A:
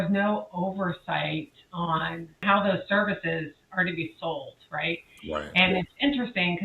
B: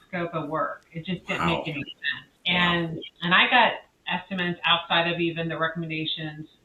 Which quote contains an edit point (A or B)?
A